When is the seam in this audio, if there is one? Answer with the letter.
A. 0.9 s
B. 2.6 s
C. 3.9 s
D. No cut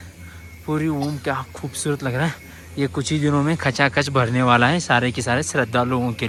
D